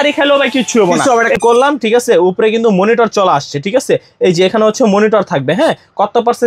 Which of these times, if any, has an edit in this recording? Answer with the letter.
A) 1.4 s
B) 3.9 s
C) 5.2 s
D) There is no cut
A